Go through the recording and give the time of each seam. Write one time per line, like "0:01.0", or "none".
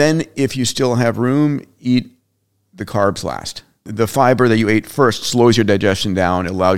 0:03.9